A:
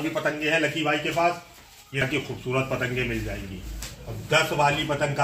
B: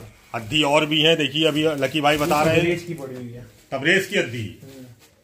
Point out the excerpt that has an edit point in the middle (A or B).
A